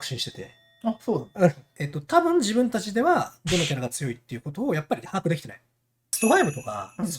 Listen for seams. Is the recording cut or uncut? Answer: cut